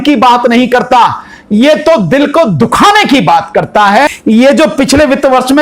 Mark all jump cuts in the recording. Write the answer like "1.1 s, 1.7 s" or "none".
4.2 s